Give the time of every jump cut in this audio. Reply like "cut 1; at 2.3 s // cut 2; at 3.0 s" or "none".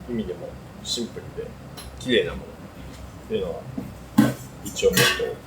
none